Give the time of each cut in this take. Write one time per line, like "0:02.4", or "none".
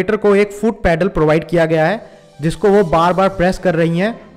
none